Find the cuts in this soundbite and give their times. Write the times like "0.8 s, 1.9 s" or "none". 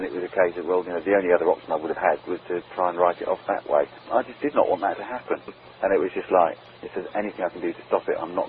5.6 s, 6.7 s